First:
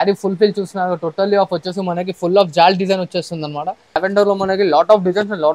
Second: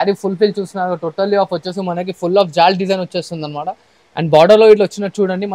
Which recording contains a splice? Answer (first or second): first